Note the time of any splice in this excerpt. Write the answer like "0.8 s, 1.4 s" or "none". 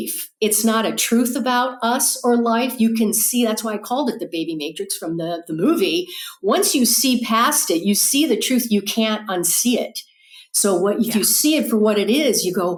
none